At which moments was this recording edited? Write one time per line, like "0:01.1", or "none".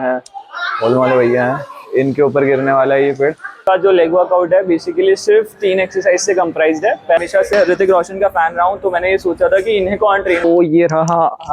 0:03.6
0:07.2
0:10.4